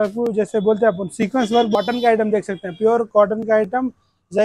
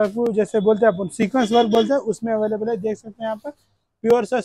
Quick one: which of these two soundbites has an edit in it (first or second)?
first